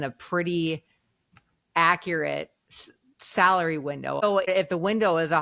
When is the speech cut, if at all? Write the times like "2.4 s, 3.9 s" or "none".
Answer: 4.4 s